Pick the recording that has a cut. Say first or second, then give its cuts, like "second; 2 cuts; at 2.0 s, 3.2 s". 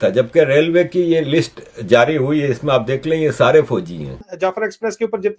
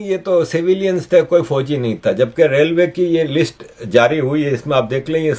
first; 1 cut; at 4.3 s